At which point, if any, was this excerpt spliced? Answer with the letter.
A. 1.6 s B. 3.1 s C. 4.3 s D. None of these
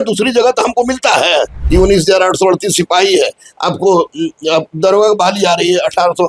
A